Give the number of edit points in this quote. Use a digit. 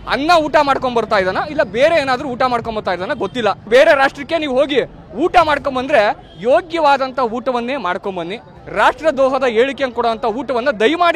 1